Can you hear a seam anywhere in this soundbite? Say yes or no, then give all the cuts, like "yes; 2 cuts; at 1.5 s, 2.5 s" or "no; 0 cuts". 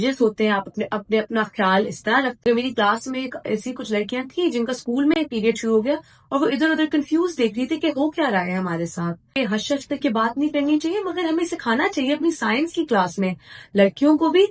yes; 2 cuts; at 2.4 s, 9.3 s